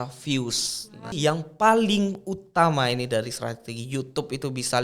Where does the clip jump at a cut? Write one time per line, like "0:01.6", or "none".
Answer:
0:01.1

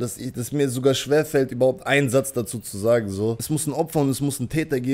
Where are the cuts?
0:03.5

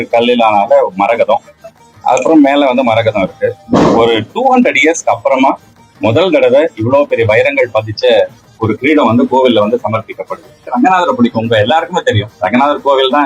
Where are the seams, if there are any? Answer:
0:10.6
0:12.3

